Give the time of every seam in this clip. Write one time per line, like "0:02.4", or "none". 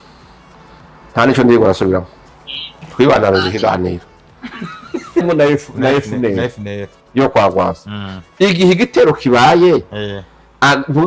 0:05.2